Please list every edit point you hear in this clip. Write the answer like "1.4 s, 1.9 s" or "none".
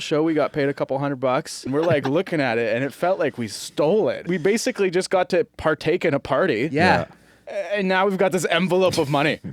1.7 s, 4.3 s